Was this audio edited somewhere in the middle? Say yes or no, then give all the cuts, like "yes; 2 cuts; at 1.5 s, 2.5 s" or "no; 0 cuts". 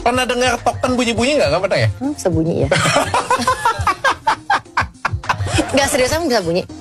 no; 0 cuts